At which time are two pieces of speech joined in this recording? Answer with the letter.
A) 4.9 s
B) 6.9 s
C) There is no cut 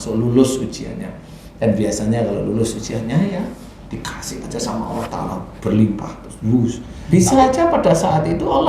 B